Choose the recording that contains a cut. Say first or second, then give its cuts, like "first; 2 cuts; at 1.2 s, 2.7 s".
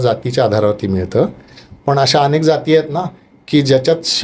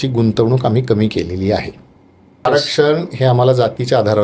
second; 1 cut; at 2.4 s